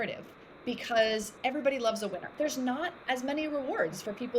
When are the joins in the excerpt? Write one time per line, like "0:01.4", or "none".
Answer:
0:02.3